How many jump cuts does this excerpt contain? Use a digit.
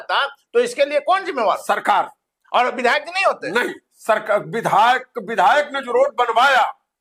0